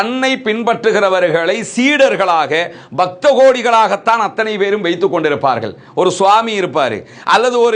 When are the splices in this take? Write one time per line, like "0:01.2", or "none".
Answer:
none